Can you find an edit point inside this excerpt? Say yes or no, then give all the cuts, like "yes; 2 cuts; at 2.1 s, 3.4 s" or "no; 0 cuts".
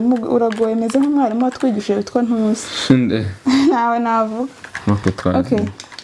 no; 0 cuts